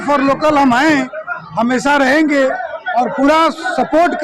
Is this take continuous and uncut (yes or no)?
yes